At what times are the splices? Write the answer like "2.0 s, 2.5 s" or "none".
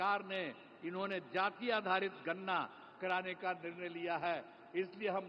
none